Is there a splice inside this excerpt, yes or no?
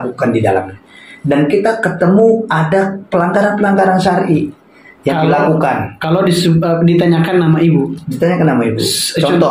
no